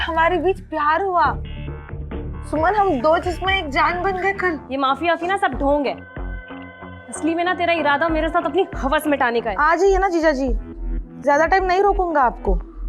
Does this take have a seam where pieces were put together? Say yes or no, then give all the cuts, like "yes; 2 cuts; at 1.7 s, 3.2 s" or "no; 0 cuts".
yes; 2 cuts; at 4.6 s, 9.5 s